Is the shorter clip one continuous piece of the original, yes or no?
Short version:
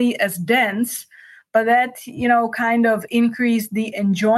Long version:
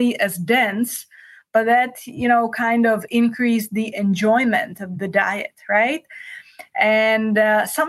yes